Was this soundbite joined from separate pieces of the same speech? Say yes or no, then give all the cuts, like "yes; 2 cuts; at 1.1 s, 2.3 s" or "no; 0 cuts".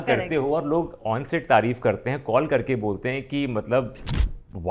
no; 0 cuts